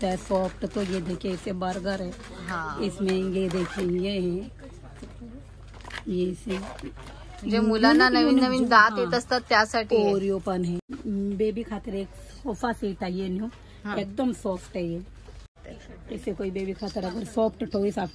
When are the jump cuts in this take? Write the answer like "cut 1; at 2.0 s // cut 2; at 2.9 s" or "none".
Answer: cut 1; at 10.9 s // cut 2; at 15.5 s